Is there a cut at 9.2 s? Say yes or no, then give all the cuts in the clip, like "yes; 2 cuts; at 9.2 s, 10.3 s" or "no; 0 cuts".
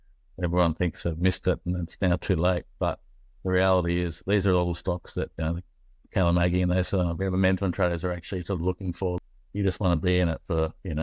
yes; 1 cut; at 9.2 s